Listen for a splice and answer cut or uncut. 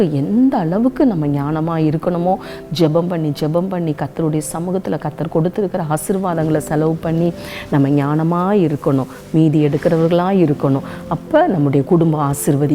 uncut